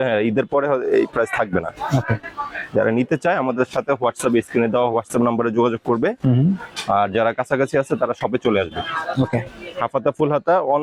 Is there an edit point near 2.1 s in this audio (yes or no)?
no